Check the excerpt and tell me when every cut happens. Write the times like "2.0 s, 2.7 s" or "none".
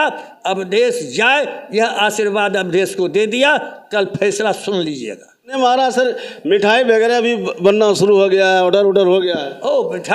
5.5 s